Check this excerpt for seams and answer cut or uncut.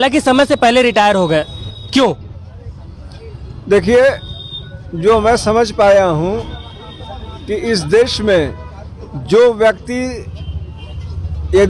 uncut